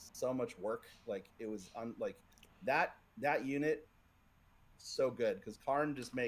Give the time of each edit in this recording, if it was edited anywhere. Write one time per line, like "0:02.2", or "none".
none